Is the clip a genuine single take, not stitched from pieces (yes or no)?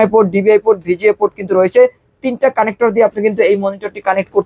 yes